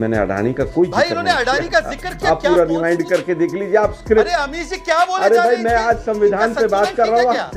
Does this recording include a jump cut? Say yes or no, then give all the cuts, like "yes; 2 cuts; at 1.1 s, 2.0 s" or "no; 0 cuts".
no; 0 cuts